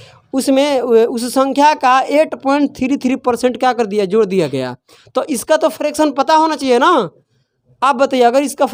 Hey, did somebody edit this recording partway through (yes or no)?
no